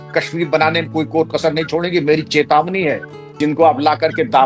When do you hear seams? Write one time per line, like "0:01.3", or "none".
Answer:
0:03.4